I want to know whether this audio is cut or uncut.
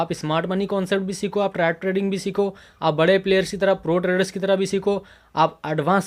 uncut